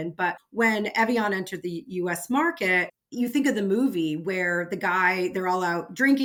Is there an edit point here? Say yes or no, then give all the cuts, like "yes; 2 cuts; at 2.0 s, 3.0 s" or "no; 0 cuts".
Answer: no; 0 cuts